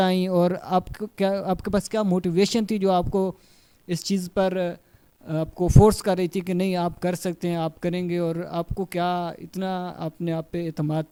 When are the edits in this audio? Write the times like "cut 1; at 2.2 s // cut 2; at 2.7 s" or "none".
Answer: none